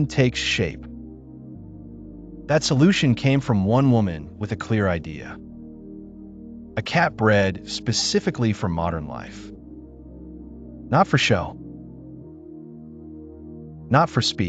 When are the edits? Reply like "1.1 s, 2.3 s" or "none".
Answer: none